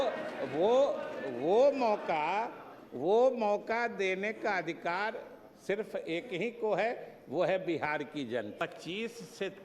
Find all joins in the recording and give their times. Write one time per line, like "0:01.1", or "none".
0:08.6